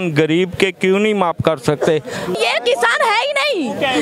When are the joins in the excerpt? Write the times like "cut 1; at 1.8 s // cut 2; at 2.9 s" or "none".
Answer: cut 1; at 2.3 s